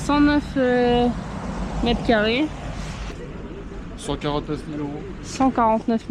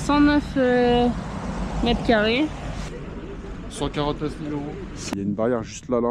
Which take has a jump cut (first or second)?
second